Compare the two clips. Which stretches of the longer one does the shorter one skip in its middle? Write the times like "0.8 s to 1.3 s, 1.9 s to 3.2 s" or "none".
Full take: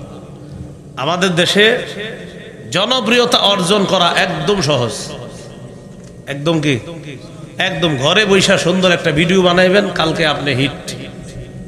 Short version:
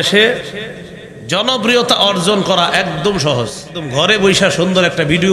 5.2 s to 7.9 s